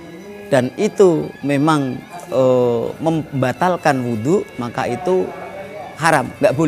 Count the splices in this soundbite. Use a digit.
0